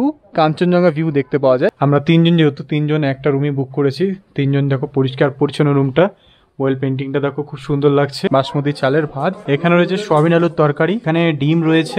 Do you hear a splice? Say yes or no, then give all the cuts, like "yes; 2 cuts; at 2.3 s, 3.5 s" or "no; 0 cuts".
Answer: yes; 4 cuts; at 1.8 s, 8.2 s, 9.4 s, 11.0 s